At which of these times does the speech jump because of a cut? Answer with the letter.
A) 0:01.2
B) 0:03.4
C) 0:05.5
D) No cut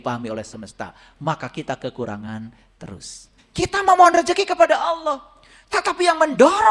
B